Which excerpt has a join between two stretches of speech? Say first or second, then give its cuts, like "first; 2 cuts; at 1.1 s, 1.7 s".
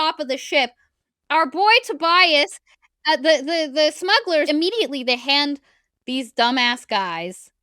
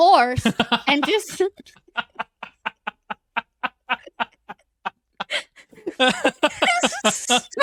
first; 1 cut; at 4.5 s